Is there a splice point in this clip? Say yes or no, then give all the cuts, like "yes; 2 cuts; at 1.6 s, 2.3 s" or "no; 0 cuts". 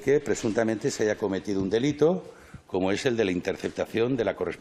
no; 0 cuts